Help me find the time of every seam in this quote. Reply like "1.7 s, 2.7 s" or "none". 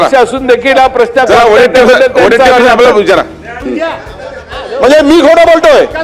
3.6 s